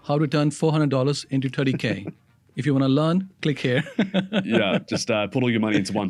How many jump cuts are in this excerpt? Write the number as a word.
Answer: zero